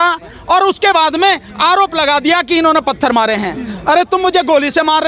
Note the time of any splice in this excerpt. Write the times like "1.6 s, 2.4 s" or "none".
none